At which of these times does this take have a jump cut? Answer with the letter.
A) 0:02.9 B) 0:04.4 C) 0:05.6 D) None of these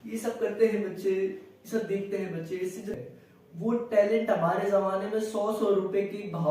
A